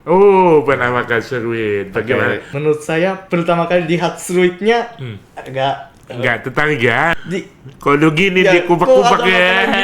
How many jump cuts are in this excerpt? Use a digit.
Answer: 2